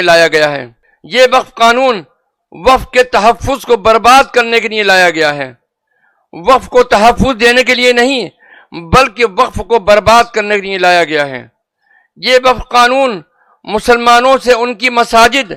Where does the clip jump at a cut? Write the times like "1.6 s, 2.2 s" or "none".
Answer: none